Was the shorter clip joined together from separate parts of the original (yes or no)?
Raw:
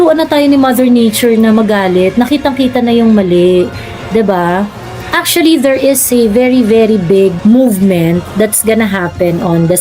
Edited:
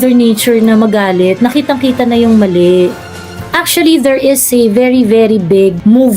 yes